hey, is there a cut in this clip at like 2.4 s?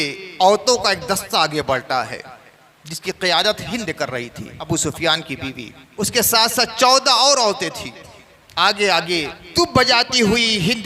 no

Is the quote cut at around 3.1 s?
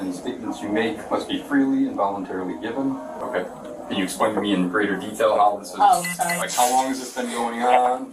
yes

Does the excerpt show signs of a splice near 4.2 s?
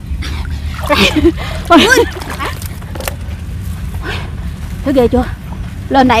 no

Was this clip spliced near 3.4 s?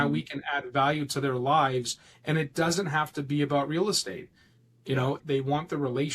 no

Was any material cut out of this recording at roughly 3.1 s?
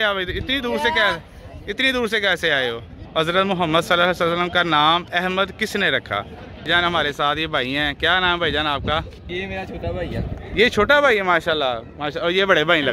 yes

